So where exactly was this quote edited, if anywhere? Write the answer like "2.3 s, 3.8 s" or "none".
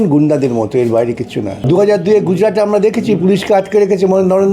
1.5 s